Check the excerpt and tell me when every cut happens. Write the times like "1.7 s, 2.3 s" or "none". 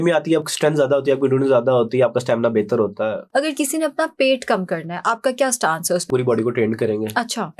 3.2 s, 6.1 s